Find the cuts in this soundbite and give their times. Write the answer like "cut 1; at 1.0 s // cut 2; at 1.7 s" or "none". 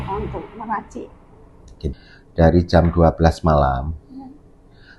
cut 1; at 1.9 s